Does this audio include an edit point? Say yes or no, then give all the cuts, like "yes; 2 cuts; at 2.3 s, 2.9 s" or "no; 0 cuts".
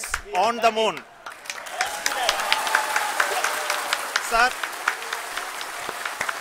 no; 0 cuts